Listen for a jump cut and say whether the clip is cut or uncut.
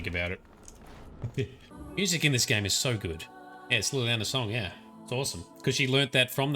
cut